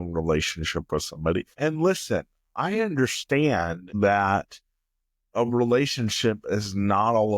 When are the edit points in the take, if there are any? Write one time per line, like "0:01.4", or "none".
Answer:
0:01.5
0:03.8